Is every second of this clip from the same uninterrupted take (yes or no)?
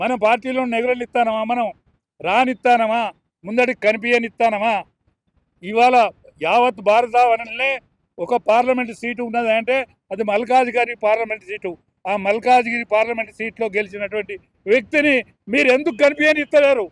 yes